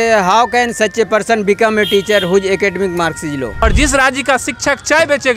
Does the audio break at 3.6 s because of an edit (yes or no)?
yes